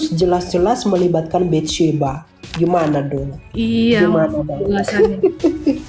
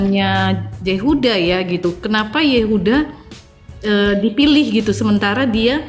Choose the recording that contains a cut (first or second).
second